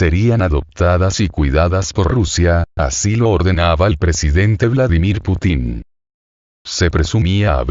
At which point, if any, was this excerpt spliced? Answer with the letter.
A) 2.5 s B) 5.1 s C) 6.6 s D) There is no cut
B